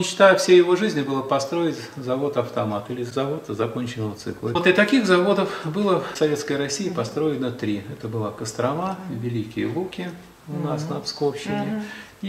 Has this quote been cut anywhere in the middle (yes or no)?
yes